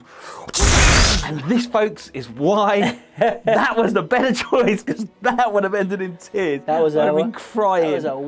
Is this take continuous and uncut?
no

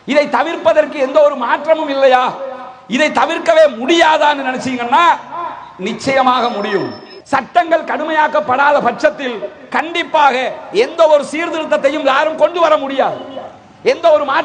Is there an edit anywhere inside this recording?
yes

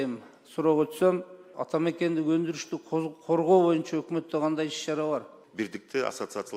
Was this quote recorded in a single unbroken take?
no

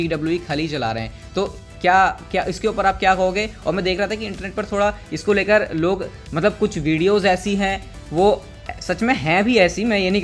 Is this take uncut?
yes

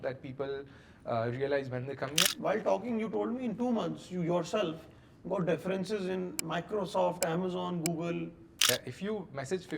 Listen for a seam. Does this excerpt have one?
yes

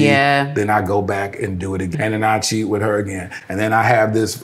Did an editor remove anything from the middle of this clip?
yes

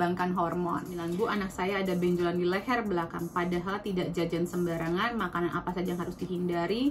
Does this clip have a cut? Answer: yes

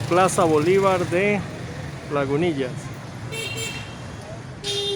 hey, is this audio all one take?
yes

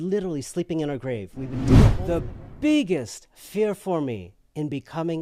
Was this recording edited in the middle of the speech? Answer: yes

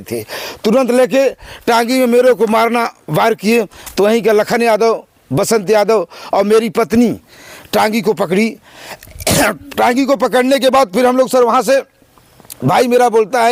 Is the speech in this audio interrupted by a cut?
no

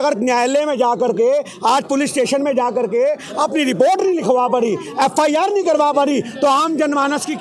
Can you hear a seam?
no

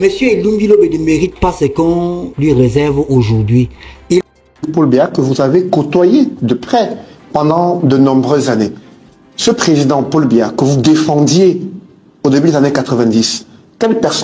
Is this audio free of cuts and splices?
no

